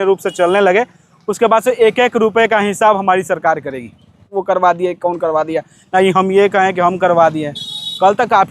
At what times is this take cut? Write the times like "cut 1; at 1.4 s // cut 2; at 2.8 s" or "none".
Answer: cut 1; at 4.3 s